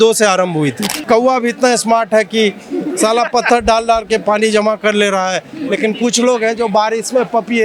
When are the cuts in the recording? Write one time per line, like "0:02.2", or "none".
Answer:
0:01.0